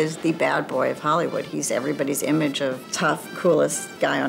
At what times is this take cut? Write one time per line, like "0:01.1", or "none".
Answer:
0:02.9